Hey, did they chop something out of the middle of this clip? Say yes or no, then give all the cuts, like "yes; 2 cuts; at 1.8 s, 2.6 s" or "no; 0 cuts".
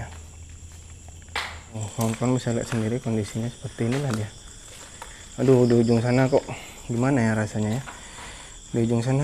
yes; 1 cut; at 1.8 s